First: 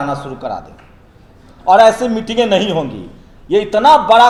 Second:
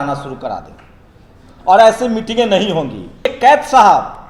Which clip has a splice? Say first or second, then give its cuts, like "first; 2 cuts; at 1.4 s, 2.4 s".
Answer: second; 1 cut; at 3.2 s